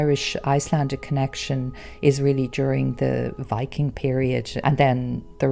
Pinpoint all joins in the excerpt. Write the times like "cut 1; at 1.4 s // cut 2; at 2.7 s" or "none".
cut 1; at 3.4 s // cut 2; at 4.5 s